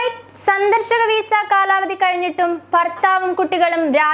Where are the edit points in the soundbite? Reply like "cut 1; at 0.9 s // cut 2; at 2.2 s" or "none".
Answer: none